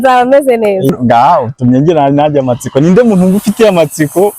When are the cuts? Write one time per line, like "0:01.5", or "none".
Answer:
0:00.9